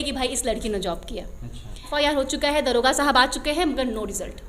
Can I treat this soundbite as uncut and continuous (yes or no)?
no